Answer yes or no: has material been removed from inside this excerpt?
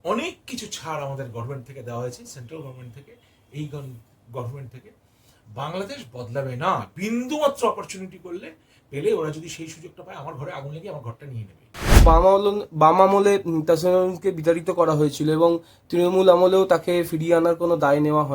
yes